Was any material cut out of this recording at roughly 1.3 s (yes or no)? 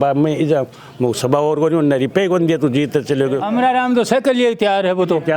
no